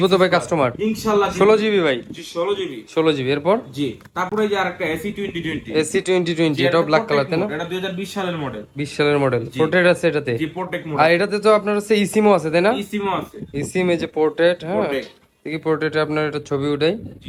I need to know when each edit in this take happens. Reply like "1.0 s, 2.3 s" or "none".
none